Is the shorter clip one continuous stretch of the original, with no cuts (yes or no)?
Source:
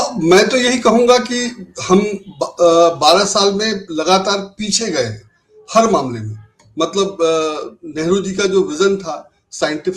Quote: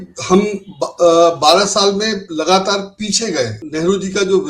no